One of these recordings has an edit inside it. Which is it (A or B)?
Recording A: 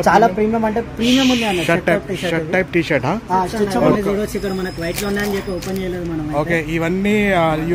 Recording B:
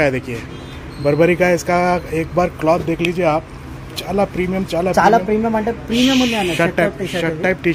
A